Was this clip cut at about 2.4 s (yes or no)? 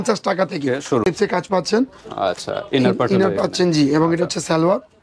no